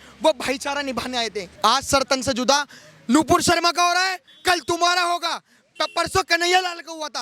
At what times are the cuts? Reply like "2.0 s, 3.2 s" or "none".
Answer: 1.4 s